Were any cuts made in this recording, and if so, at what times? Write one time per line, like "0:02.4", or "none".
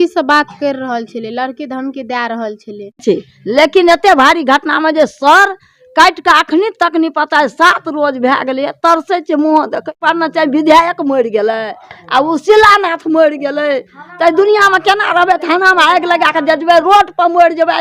0:03.0
0:09.9